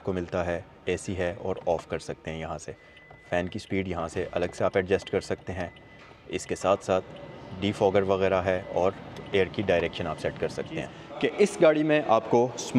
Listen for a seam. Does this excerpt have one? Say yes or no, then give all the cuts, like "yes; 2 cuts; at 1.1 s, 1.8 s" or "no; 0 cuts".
yes; 1 cut; at 10.9 s